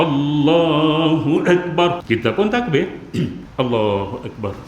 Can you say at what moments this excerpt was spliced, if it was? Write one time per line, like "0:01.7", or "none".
0:02.0
0:03.4

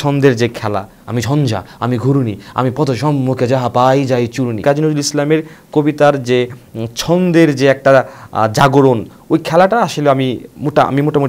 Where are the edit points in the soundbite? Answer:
0:00.9
0:04.6
0:09.1

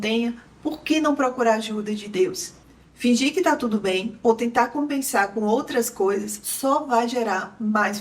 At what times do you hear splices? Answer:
0:02.6

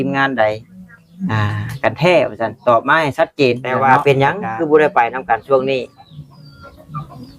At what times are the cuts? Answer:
0:03.8

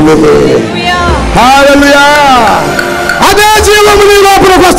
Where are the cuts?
none

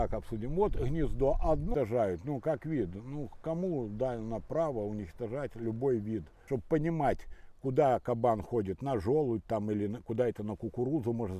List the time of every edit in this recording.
0:01.7
0:06.3

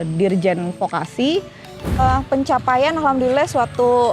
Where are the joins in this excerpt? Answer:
0:02.0

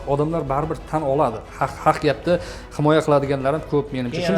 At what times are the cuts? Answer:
none

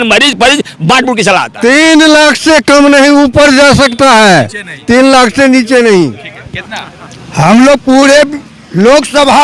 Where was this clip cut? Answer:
0:01.5

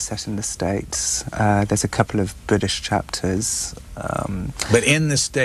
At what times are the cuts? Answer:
0:02.7

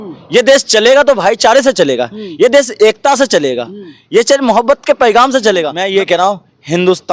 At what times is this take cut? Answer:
0:05.8

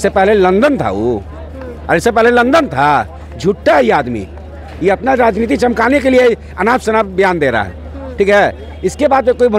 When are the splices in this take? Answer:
none

